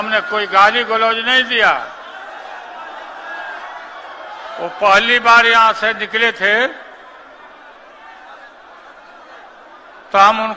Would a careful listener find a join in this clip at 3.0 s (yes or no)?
no